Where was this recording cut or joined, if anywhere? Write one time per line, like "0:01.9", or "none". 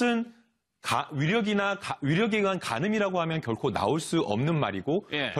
0:01.3